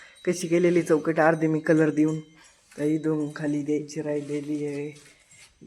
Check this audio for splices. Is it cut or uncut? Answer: uncut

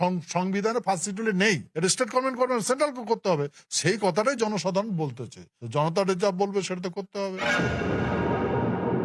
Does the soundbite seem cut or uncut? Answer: cut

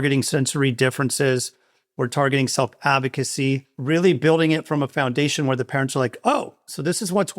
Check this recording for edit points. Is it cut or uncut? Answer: cut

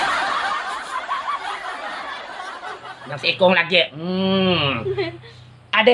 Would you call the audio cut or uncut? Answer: cut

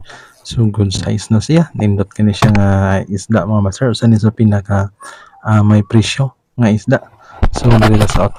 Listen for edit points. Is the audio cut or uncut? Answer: uncut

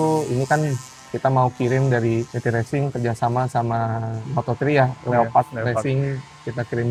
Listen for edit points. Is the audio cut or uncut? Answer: uncut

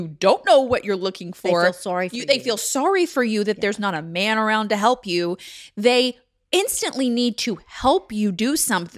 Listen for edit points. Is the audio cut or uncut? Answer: uncut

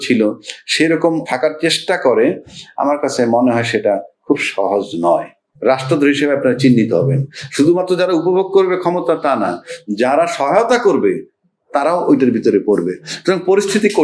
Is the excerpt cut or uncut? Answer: cut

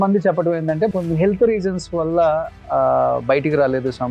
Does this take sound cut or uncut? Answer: cut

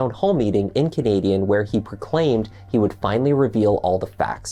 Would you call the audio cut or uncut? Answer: uncut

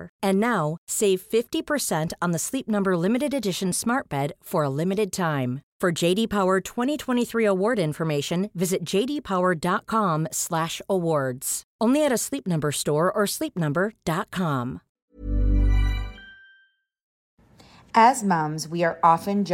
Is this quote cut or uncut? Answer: cut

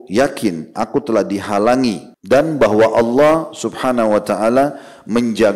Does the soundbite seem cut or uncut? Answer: cut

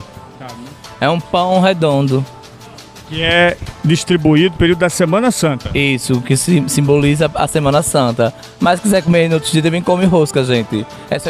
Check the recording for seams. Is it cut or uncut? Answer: uncut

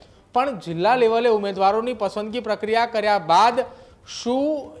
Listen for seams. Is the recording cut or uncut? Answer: uncut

